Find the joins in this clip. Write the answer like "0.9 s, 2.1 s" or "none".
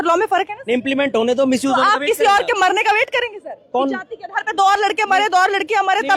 none